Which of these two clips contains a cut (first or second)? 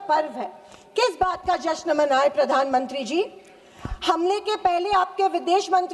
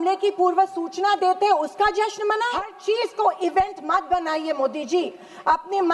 second